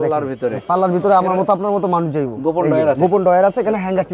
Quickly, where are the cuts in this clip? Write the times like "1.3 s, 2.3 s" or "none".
none